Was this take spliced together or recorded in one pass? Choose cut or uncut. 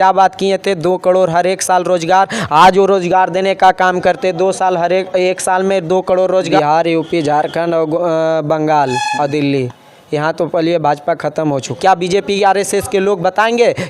cut